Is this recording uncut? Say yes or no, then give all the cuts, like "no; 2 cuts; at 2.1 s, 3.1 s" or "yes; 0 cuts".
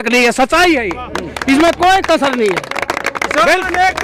yes; 0 cuts